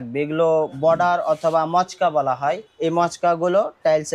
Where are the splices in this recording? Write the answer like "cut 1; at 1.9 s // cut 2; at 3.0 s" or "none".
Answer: cut 1; at 2.7 s